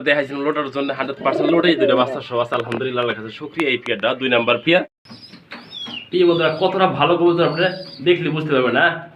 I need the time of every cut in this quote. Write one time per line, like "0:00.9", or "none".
0:05.0

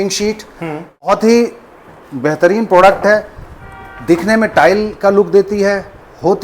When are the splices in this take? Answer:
0:01.1

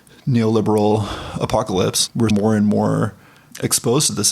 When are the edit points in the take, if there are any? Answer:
0:02.3

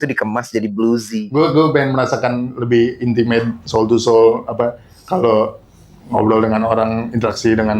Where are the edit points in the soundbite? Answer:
0:01.2

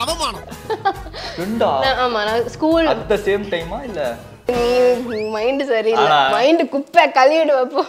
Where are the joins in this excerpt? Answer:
0:04.5

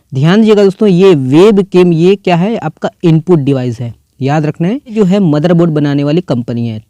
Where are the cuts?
0:04.9

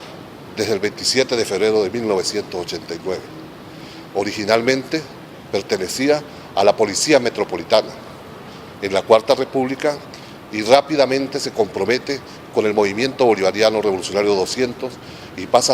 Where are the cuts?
0:02.8

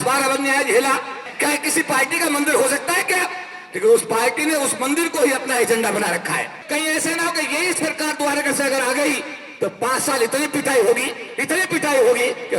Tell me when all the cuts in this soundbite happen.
0:01.3
0:06.5

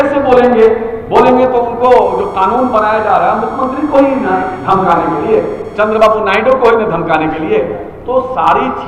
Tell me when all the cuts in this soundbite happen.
none

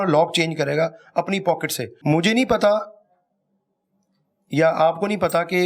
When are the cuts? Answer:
0:01.9

